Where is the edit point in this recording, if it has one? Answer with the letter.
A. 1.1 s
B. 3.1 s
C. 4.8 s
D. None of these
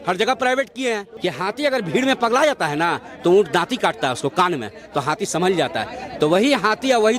A